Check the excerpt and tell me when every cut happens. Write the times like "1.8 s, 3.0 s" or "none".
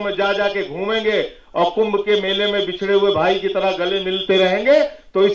none